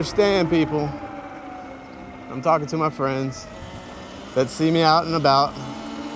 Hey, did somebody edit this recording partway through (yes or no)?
no